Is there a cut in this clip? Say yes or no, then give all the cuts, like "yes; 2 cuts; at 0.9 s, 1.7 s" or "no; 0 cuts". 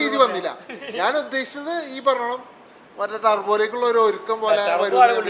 no; 0 cuts